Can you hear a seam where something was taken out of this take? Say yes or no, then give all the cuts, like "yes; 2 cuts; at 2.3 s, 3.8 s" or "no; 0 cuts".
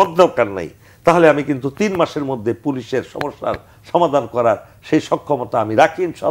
no; 0 cuts